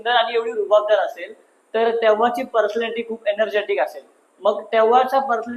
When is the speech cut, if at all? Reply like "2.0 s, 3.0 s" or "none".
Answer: none